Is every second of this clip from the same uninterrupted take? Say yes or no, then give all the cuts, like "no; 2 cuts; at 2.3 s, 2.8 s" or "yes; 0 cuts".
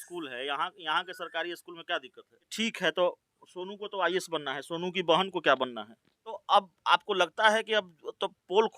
no; 2 cuts; at 2.4 s, 6.4 s